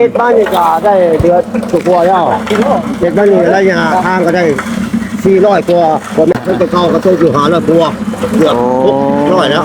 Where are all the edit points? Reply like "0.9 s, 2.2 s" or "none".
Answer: 6.4 s